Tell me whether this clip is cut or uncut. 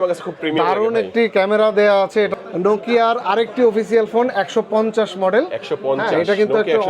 cut